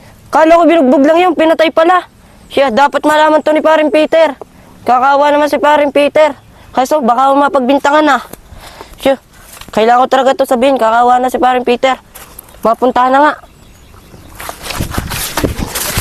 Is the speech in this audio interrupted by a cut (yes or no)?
no